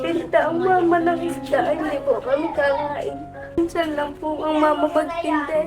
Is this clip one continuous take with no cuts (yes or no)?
no